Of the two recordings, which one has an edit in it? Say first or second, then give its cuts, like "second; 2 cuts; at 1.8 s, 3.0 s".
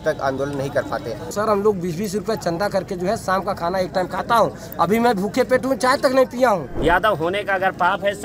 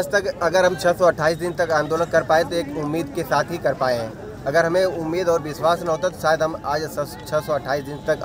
first; 2 cuts; at 1.3 s, 6.7 s